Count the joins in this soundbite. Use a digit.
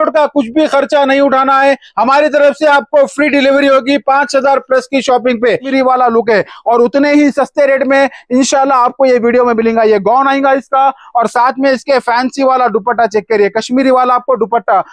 1